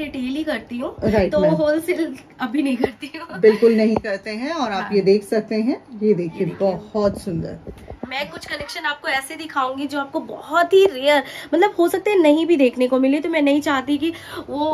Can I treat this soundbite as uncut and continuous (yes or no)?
yes